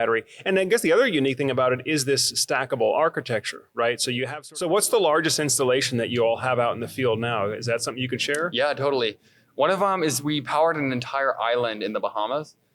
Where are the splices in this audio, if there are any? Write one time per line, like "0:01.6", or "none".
0:04.4